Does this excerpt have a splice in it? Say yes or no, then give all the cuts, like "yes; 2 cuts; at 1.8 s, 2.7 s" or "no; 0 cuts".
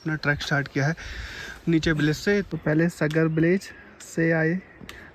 yes; 1 cut; at 2.5 s